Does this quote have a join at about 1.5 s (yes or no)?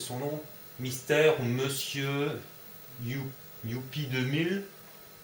no